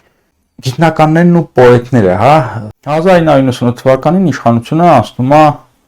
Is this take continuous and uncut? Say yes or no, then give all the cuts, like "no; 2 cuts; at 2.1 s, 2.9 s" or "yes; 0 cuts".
no; 1 cut; at 2.6 s